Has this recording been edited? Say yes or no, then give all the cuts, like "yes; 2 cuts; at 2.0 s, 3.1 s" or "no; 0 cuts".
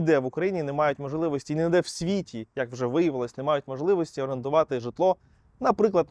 no; 0 cuts